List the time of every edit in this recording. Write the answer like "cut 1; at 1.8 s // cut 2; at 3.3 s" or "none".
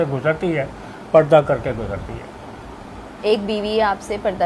none

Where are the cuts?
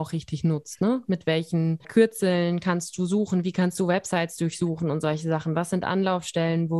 cut 1; at 1.9 s

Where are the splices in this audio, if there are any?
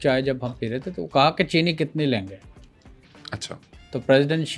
none

